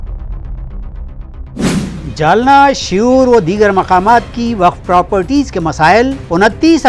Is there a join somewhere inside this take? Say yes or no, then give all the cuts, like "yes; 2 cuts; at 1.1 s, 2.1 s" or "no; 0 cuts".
no; 0 cuts